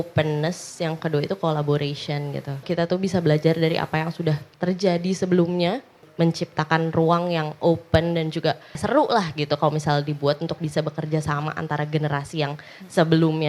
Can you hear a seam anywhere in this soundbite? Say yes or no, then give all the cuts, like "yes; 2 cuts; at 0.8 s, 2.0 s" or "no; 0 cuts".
yes; 3 cuts; at 2.6 s, 6.0 s, 8.8 s